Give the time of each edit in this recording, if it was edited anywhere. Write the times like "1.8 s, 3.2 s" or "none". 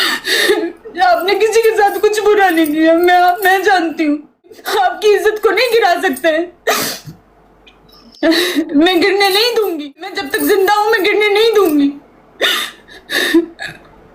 4.6 s, 10.2 s

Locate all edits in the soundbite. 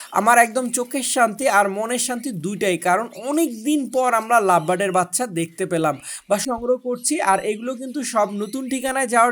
6.4 s

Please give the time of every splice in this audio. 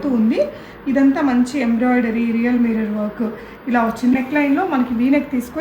4.1 s

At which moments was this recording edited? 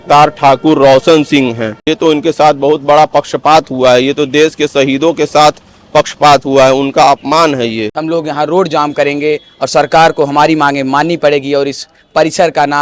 1.9 s, 7.9 s

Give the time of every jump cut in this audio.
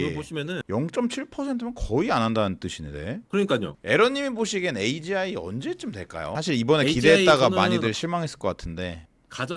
3.7 s

